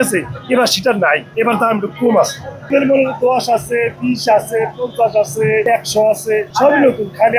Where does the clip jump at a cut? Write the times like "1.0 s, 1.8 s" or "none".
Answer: none